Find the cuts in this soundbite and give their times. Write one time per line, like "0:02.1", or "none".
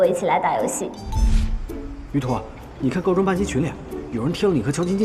0:01.0

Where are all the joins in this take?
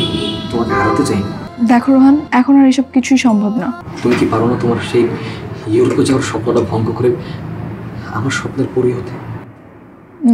0:01.4
0:02.3
0:03.9

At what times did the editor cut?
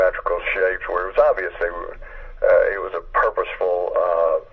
0:01.5

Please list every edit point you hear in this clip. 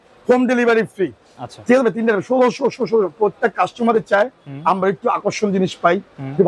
none

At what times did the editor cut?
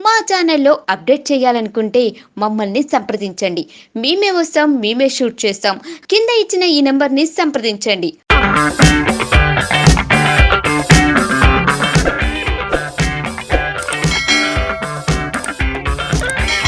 none

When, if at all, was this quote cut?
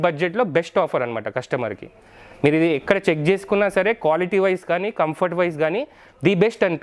none

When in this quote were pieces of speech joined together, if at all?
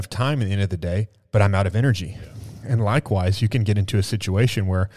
none

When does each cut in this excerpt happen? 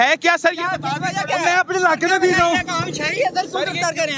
none

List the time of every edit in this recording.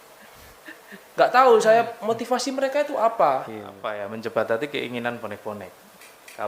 0:04.0

